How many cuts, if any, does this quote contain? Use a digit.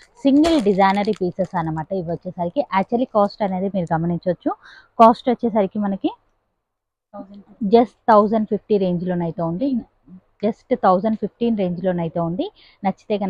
0